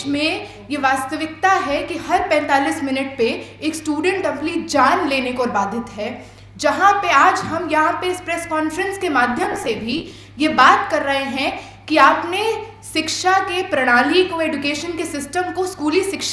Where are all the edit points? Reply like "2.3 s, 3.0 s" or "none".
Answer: none